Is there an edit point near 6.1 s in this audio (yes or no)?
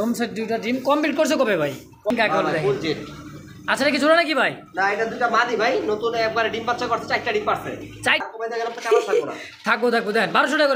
no